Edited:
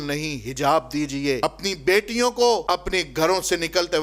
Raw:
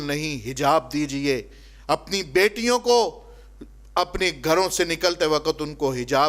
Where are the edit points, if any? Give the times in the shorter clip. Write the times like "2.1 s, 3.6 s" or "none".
1.4 s, 2.6 s

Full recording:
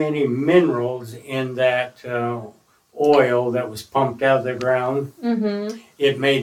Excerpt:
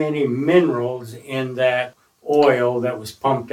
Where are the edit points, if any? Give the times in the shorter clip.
2.0 s

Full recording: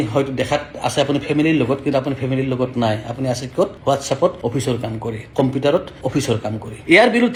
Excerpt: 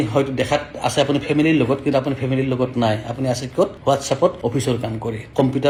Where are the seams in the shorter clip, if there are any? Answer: none

